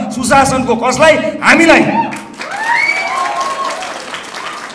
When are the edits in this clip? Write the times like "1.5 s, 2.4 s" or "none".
none